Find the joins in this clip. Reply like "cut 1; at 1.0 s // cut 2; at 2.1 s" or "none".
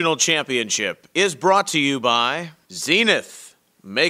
cut 1; at 2.5 s